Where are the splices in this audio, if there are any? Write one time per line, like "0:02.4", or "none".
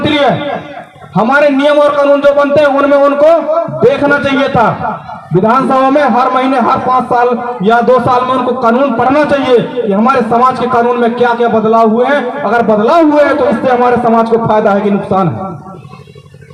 none